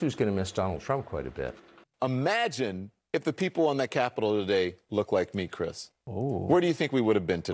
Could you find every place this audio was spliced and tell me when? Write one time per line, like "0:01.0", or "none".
0:01.9